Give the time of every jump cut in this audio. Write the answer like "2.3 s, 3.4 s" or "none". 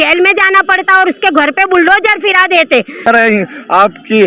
3.1 s